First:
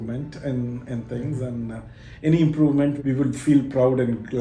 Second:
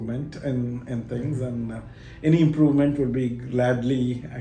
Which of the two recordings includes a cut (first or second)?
first